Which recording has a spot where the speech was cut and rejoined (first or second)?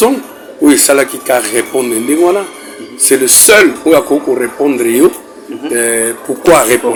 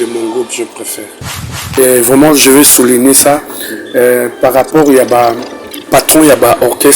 second